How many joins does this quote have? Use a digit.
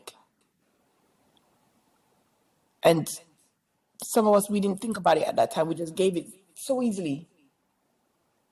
0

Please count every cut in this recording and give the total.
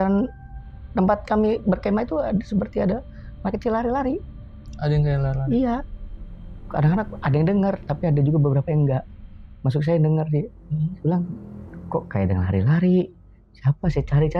0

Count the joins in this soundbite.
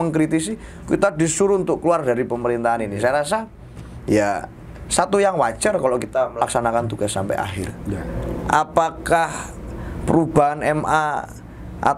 1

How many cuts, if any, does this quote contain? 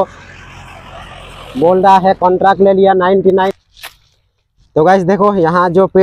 1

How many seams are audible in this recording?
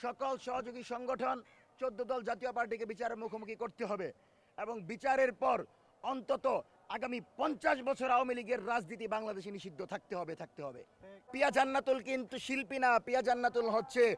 1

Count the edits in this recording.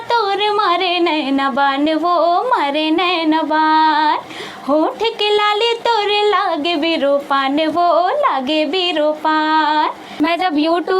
1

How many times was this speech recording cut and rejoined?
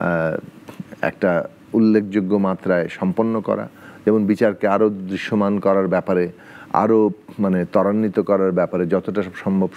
0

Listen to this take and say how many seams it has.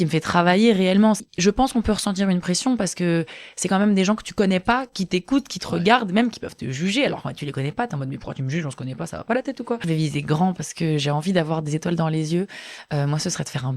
2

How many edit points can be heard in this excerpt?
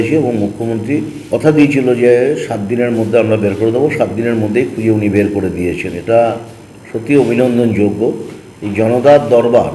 1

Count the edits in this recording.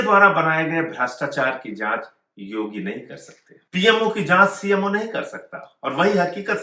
1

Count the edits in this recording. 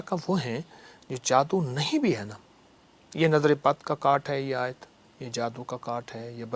0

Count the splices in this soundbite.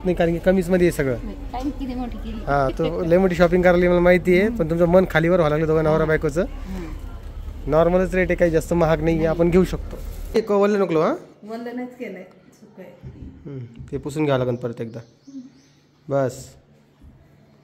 1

